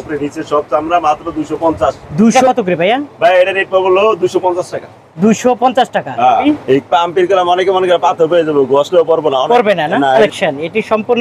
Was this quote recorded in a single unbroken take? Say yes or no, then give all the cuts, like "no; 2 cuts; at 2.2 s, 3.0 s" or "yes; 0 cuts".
no; 3 cuts; at 2.4 s, 6.4 s, 10.2 s